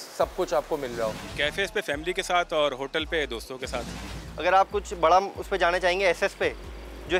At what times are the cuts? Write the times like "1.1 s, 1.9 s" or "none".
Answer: 1.2 s, 4.0 s